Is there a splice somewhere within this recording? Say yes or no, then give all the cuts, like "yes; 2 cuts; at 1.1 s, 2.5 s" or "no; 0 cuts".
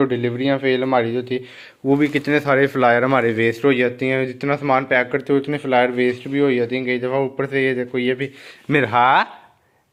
no; 0 cuts